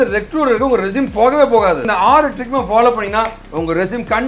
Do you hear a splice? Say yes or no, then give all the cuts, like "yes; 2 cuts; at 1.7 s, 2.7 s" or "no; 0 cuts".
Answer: yes; 1 cut; at 1.9 s